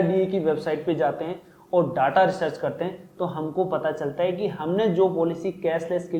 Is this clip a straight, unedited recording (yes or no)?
yes